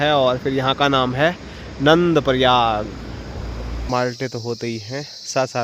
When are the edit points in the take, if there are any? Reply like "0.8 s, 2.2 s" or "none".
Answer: 3.8 s